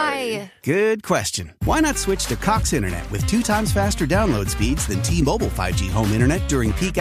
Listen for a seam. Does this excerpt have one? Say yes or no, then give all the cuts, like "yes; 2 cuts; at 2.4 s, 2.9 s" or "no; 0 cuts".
no; 0 cuts